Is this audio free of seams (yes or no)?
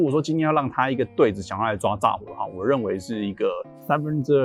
yes